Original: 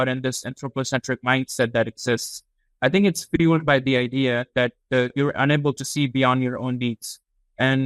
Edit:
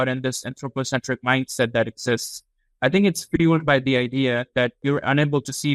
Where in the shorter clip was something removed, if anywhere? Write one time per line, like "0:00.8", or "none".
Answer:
0:04.8